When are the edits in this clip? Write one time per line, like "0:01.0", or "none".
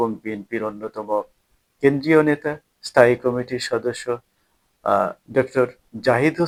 none